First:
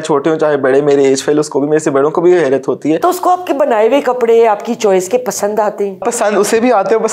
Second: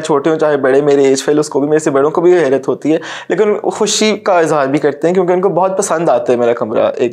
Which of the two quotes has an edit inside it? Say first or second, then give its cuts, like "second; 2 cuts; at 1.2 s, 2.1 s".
first; 2 cuts; at 3.0 s, 6.0 s